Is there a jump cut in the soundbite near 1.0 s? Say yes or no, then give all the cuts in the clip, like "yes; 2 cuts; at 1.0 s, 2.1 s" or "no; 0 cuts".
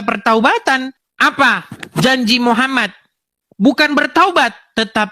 yes; 1 cut; at 1.0 s